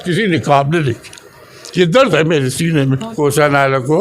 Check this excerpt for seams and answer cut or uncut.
cut